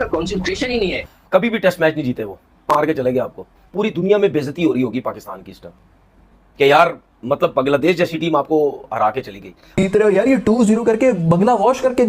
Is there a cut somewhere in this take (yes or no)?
yes